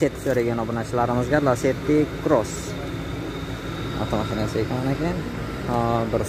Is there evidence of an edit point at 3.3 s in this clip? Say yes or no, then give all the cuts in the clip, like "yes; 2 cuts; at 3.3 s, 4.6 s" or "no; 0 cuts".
no; 0 cuts